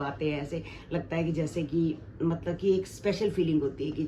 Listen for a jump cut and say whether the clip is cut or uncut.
uncut